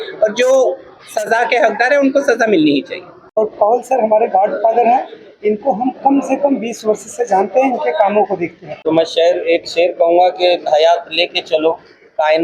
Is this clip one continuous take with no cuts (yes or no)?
no